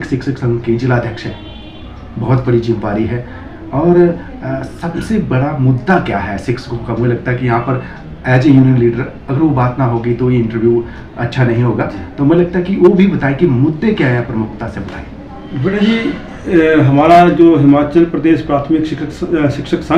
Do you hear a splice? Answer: no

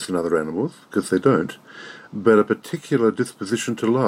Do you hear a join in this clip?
no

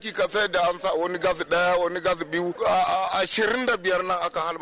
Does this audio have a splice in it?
no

